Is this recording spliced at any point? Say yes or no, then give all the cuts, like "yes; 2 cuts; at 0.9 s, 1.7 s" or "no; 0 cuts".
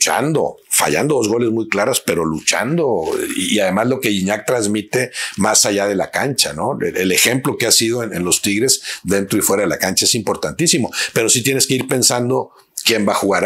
no; 0 cuts